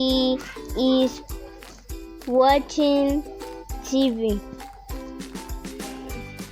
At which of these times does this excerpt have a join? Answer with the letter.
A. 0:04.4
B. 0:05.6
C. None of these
A